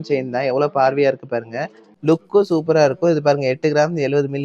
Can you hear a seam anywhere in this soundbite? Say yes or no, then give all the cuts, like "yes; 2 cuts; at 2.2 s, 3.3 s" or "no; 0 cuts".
no; 0 cuts